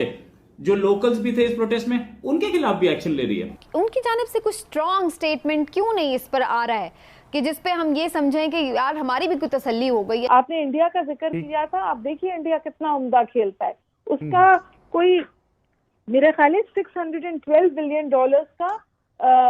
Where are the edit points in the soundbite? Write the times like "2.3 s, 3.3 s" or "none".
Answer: 3.6 s, 10.3 s